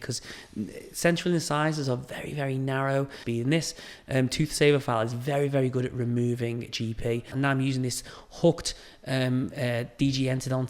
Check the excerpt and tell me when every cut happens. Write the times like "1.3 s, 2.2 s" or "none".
3.2 s, 7.3 s